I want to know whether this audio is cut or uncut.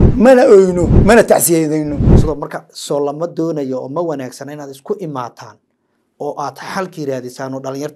cut